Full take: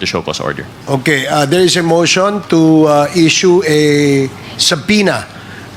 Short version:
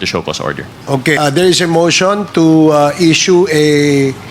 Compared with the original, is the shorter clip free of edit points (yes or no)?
no